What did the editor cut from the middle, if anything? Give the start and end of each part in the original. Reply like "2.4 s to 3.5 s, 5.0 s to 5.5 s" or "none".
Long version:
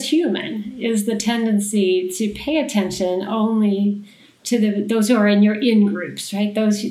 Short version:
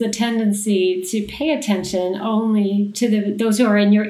4.0 s to 4.4 s

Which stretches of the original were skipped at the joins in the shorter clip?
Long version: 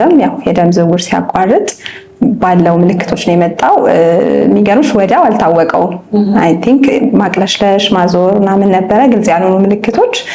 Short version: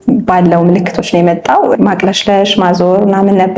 3.9 s to 7.1 s

